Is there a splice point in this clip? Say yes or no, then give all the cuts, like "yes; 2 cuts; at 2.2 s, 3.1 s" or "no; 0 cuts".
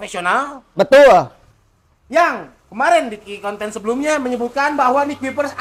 no; 0 cuts